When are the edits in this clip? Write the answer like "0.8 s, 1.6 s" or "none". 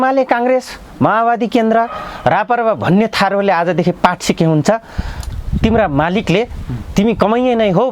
none